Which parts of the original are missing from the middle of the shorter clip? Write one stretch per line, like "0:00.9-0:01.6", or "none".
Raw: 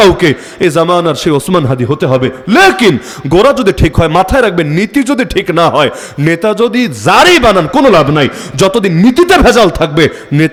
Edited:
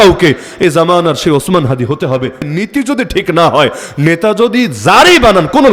0:02.5-0:04.7